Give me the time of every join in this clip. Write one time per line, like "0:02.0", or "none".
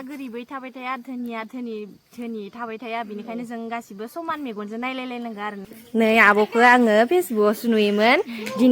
0:05.7